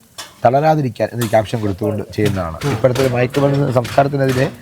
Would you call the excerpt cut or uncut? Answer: uncut